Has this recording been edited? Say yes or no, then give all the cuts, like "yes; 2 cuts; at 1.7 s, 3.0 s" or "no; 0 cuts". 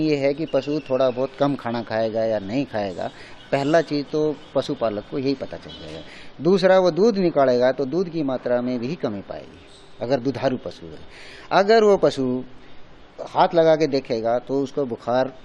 no; 0 cuts